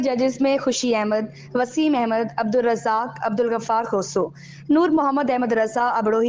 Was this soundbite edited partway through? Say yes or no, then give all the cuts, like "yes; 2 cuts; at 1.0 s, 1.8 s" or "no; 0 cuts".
no; 0 cuts